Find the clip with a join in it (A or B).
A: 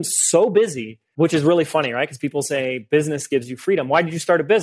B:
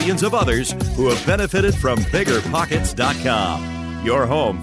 A